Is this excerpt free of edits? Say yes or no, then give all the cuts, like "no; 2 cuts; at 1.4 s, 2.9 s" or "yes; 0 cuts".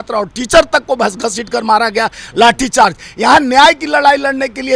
yes; 0 cuts